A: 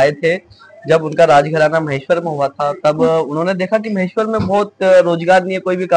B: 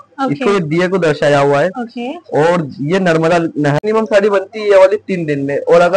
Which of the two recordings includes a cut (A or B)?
B